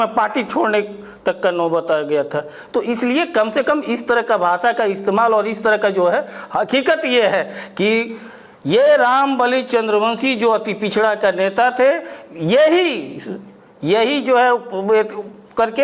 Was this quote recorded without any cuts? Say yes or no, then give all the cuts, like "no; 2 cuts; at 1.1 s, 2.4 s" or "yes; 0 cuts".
yes; 0 cuts